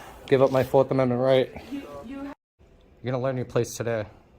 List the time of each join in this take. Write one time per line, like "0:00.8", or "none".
0:02.3